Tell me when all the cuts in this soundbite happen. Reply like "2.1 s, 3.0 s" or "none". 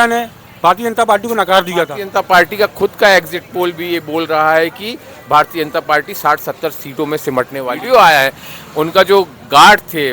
2.0 s, 7.8 s